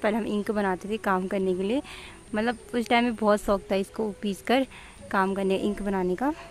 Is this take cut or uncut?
uncut